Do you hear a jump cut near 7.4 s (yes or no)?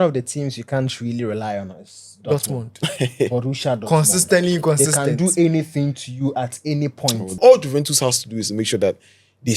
yes